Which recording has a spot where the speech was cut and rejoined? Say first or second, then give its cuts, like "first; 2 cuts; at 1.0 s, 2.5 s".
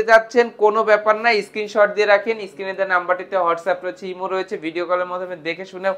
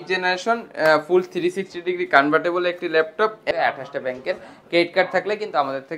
second; 1 cut; at 3.5 s